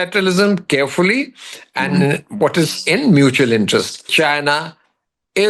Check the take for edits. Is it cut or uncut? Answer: cut